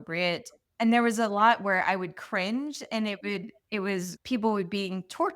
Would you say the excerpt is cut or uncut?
cut